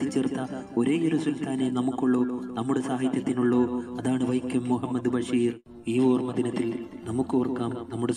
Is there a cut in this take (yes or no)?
yes